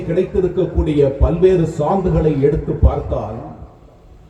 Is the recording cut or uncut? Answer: uncut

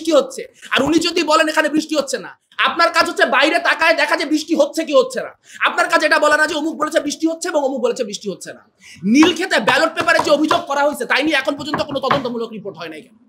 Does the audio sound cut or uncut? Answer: uncut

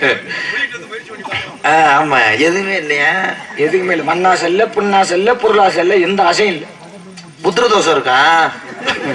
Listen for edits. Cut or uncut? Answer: uncut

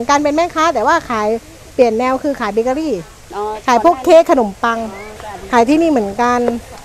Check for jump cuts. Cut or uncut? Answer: uncut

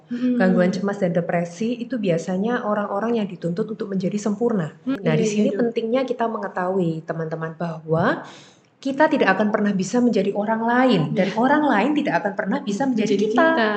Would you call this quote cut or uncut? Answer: cut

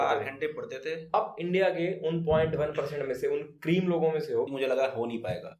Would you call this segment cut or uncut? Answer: cut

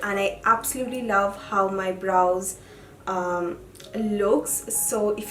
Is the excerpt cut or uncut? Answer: uncut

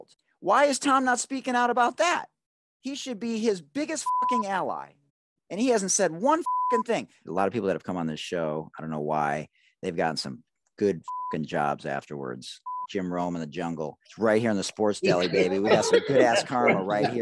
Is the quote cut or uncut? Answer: cut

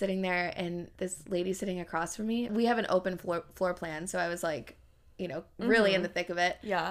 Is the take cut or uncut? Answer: cut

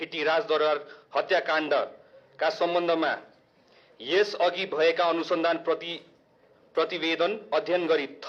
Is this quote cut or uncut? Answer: uncut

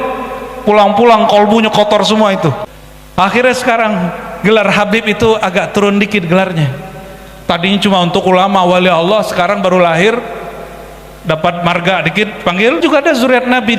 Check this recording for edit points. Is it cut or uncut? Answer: cut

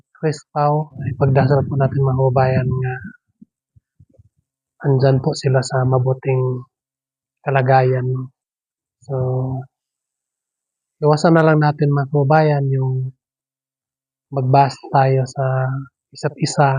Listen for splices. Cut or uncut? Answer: cut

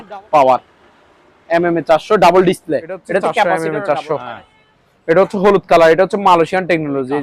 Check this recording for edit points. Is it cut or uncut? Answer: cut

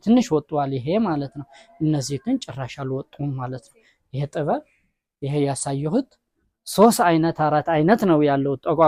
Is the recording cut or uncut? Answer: uncut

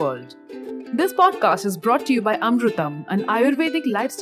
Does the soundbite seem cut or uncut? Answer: uncut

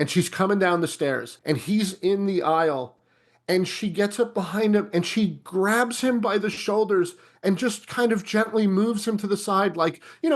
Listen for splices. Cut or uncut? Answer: cut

